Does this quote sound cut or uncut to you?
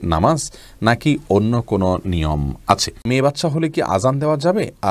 cut